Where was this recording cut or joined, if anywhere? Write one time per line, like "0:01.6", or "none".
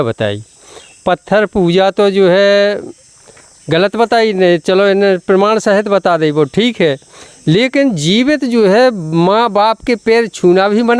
none

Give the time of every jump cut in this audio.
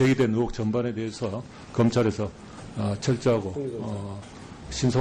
none

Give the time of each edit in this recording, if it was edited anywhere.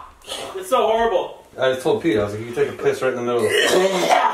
0:01.4

